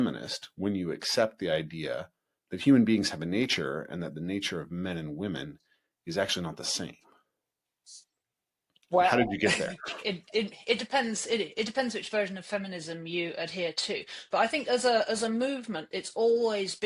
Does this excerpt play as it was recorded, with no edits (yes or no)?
yes